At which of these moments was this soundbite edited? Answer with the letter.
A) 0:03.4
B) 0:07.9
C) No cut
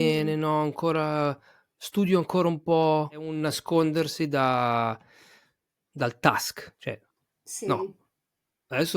A